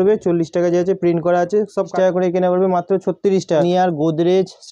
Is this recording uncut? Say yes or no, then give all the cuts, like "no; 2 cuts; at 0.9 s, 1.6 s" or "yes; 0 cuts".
no; 2 cuts; at 1.9 s, 3.6 s